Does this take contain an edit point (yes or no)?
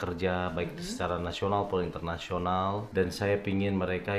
yes